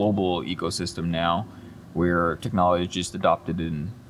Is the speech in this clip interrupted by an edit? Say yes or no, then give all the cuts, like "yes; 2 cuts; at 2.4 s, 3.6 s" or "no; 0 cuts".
no; 0 cuts